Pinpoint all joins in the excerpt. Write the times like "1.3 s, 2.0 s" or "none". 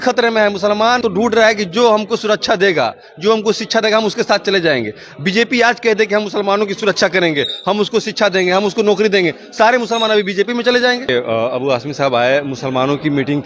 1.0 s, 11.1 s